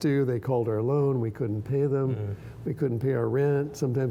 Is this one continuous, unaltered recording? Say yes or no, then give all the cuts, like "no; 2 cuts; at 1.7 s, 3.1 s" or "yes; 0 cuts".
yes; 0 cuts